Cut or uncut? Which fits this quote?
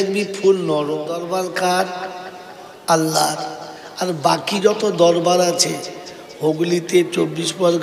cut